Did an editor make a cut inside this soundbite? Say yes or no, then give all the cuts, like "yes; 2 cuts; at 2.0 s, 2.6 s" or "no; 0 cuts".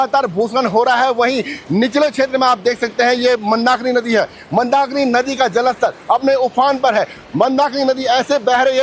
no; 0 cuts